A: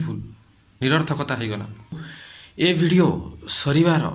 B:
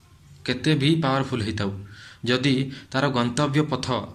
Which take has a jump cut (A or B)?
A